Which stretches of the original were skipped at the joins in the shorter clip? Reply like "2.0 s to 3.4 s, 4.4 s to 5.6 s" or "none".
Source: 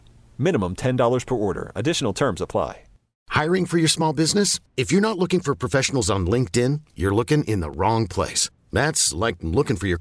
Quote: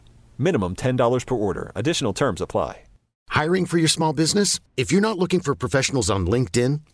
none

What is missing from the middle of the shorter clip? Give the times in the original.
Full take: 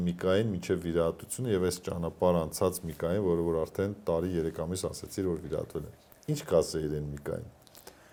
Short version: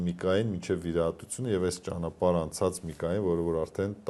none

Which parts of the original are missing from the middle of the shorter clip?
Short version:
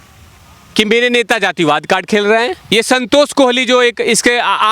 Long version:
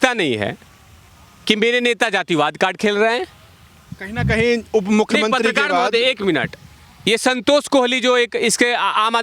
3.3 s to 6.9 s

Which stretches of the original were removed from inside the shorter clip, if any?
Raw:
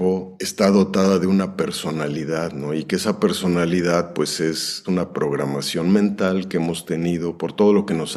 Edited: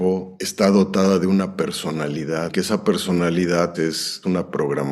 2.5 s to 2.9 s, 4.1 s to 4.4 s

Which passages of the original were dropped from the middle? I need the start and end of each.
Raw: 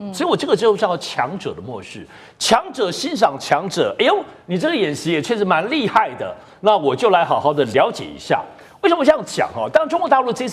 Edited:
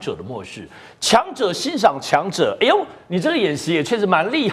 none

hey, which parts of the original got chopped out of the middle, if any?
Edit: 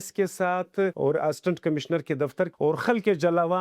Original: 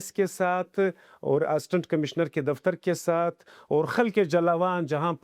0.9 s to 1.2 s, 2.8 s to 3.6 s

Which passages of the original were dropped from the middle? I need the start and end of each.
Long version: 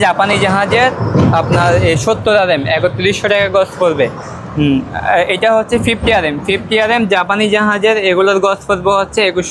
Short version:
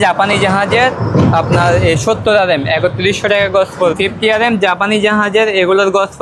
3.9 s to 6.4 s

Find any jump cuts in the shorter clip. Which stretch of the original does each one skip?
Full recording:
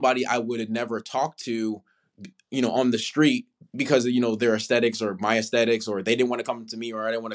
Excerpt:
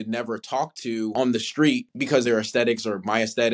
1.8 s to 2.7 s, 3.8 s to 4.4 s

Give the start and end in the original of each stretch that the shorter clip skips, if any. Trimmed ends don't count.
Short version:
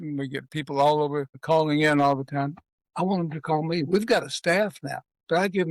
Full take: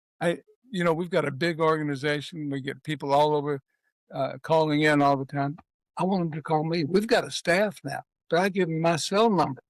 3.7 s to 4.4 s

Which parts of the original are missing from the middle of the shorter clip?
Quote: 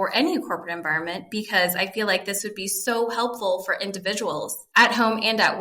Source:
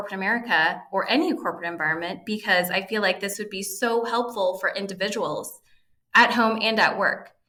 5.5 s to 6.0 s

